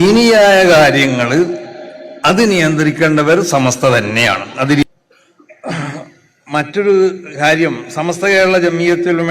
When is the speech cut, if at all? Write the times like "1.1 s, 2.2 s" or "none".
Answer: 4.8 s